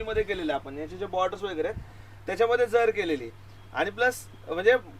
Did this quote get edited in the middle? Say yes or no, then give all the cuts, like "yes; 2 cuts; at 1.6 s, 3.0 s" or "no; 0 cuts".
no; 0 cuts